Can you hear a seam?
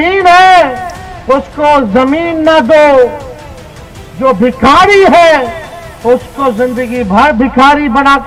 no; 0 cuts

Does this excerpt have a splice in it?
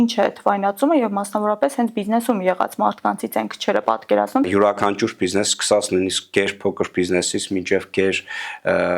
yes; 1 cut; at 4.5 s

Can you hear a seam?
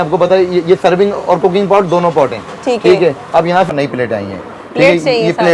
yes; 1 cut; at 3.7 s

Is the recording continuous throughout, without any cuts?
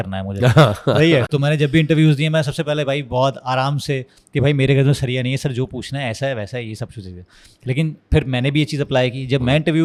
yes; 0 cuts

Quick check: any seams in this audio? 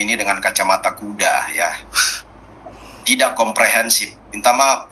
no; 0 cuts

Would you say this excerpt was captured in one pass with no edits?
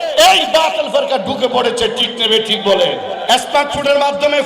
no; 1 cut; at 3.2 s

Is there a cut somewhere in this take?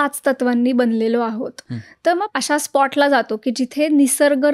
yes; 1 cut; at 2.3 s

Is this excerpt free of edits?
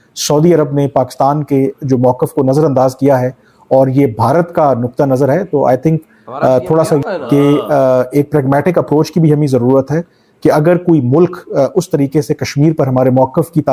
yes; 0 cuts

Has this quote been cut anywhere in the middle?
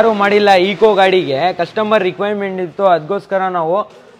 no; 0 cuts

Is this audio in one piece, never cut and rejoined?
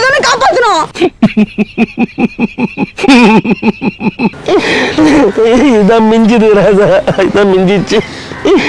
no; 1 cut; at 4.3 s

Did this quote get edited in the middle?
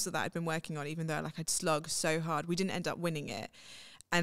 no; 0 cuts

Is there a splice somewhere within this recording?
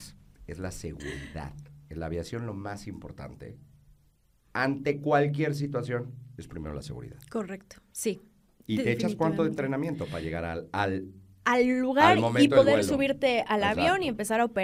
no; 0 cuts

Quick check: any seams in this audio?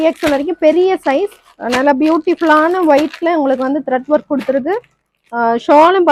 no; 0 cuts

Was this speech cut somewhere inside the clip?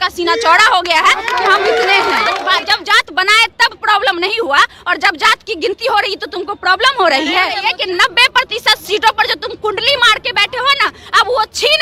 yes; 2 cuts; at 2.4 s, 7.6 s

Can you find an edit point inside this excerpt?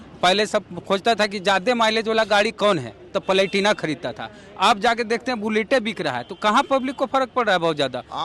no; 0 cuts

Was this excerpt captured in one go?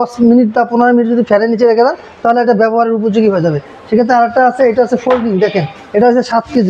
yes; 0 cuts

